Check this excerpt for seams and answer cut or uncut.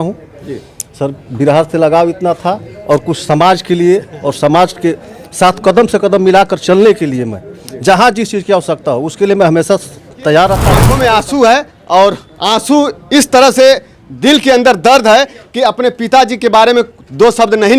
cut